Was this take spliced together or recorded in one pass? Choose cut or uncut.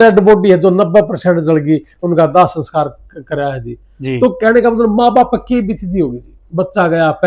uncut